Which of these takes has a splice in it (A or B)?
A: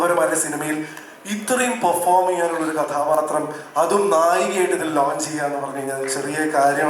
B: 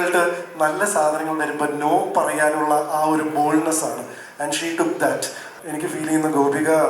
B